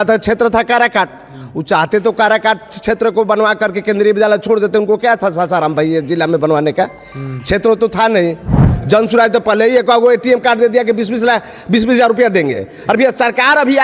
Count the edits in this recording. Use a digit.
1